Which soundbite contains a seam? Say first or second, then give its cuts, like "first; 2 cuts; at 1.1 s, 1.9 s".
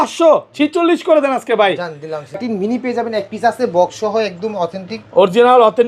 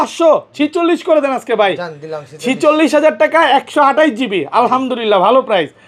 first; 1 cut; at 2.4 s